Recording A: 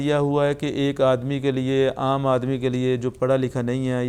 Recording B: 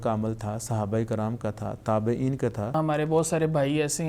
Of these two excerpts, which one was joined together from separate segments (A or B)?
B